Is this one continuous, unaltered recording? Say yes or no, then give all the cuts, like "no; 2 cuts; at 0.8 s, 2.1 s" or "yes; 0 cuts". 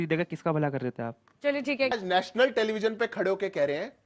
no; 1 cut; at 1.9 s